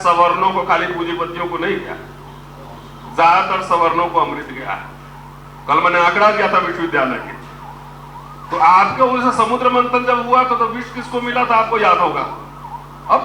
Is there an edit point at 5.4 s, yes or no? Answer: no